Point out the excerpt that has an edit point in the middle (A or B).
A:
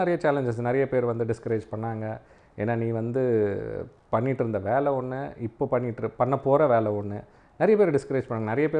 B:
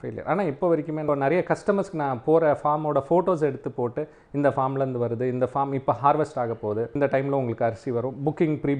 B